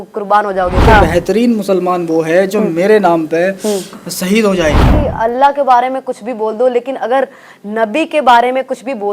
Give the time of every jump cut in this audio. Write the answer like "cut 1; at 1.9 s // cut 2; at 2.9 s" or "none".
cut 1; at 0.8 s // cut 2; at 4.9 s